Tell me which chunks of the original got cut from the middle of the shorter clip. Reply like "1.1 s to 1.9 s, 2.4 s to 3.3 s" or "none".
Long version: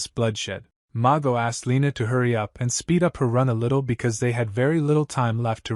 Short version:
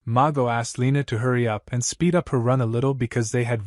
none